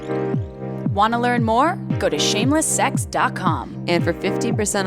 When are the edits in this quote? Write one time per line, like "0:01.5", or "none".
0:00.9